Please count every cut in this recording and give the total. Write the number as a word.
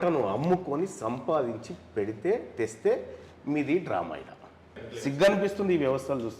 one